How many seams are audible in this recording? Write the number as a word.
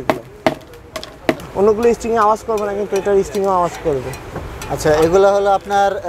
one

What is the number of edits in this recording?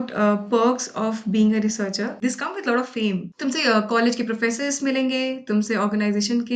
two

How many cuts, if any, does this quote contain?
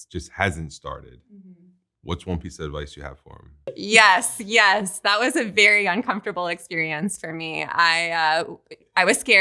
one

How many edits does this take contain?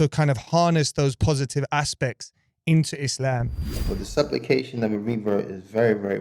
one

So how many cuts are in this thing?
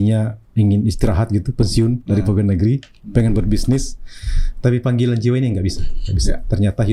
zero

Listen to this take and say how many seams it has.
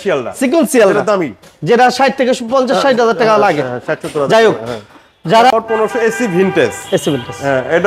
one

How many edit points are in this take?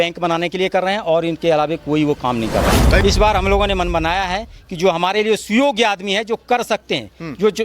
one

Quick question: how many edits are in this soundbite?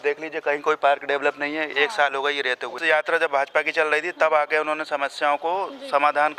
one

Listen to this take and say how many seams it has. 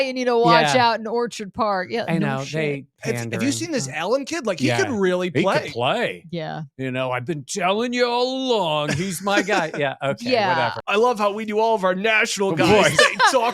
one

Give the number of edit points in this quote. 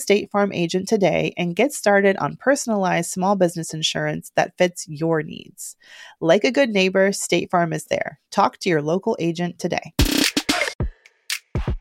one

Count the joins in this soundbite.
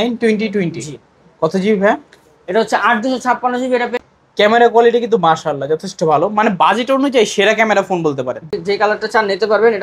two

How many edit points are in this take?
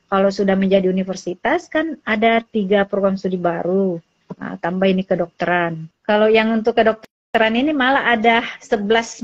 one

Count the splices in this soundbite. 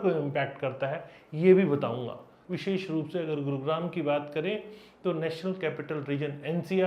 one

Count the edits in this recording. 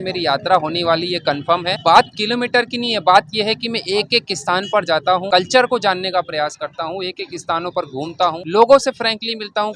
zero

